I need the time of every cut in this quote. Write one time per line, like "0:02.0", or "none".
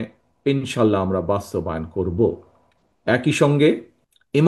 none

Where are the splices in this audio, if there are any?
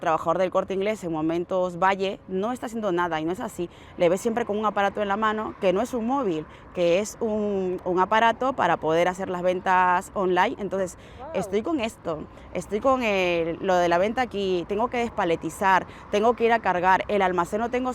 none

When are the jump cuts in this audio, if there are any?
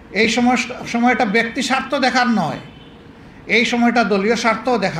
none

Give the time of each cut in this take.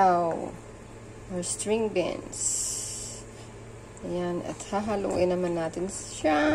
none

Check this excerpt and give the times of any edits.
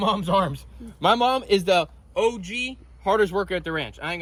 none

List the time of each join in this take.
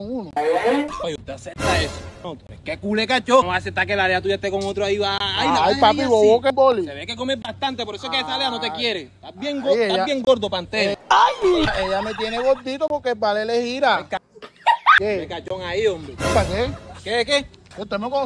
0:01.0
0:02.2
0:03.5
0:06.5
0:15.0

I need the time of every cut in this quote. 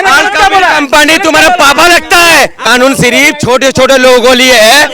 0:02.6

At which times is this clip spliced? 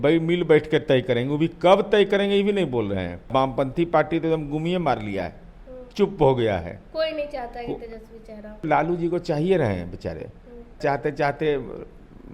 0:03.3
0:08.6
0:10.8

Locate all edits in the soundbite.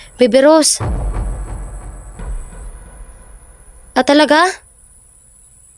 0:00.8
0:03.7

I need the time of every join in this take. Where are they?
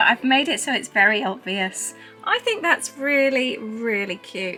none

